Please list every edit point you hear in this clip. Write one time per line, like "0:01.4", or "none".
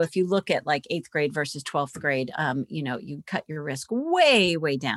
none